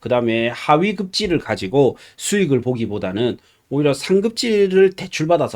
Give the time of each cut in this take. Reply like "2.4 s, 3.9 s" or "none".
none